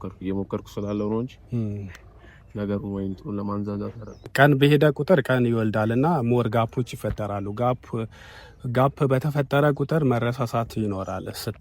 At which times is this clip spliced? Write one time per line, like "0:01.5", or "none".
0:04.3